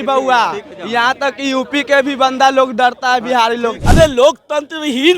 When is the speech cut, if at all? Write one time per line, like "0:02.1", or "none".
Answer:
0:03.8